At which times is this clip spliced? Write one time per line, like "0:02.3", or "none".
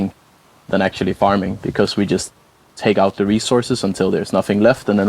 0:01.6